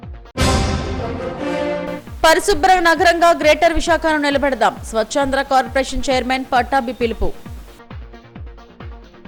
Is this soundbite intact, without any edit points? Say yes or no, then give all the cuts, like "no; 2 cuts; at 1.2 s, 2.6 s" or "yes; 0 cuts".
yes; 0 cuts